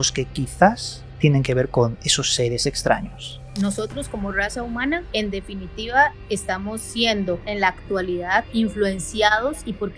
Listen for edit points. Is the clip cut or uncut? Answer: cut